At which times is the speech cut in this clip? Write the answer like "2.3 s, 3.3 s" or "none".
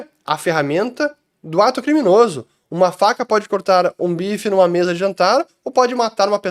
none